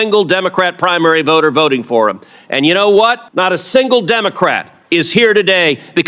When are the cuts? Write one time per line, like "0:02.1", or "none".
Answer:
0:03.2